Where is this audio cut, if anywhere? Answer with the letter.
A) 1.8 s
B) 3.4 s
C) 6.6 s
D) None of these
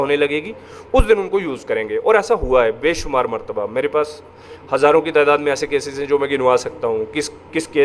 D